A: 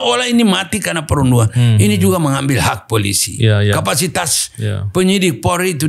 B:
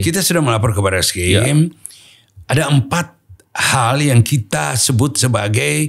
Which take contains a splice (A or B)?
B